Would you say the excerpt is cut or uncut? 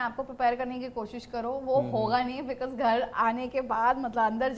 uncut